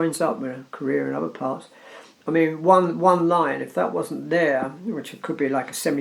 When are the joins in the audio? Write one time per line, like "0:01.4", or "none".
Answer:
none